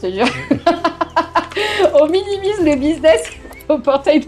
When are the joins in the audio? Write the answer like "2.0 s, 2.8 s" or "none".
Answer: none